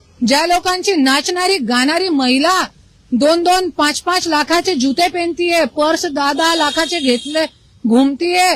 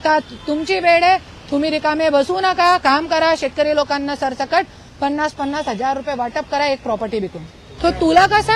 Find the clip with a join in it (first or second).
second